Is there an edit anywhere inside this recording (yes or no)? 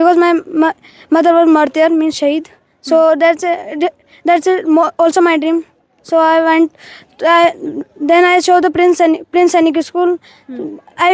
no